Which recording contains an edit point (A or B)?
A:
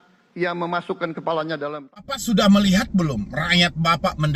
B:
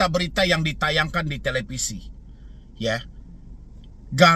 A